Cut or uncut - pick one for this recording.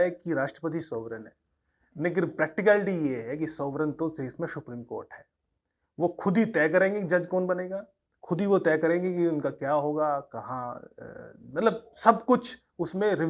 uncut